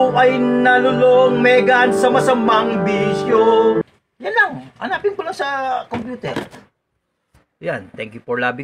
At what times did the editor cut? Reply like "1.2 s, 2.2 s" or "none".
3.8 s